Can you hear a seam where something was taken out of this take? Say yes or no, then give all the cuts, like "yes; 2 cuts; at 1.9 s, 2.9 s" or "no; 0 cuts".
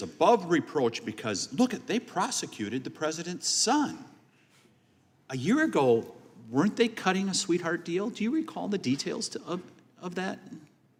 no; 0 cuts